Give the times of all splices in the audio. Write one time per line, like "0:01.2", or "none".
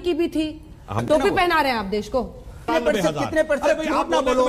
0:01.0
0:02.7